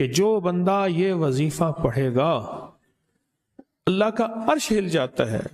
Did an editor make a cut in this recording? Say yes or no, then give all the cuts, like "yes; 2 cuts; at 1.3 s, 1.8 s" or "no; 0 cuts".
no; 0 cuts